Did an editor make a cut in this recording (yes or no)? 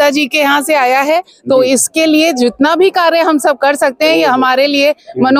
no